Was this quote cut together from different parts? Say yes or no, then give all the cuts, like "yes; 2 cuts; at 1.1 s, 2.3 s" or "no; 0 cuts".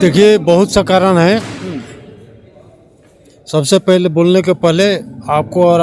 no; 0 cuts